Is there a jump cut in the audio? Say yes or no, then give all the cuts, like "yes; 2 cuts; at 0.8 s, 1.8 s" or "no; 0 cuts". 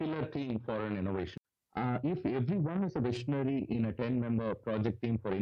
yes; 1 cut; at 1.3 s